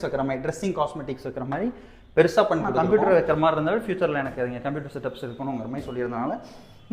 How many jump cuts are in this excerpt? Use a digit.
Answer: 1